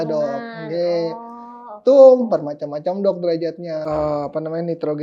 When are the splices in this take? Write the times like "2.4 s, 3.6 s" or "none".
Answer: 3.8 s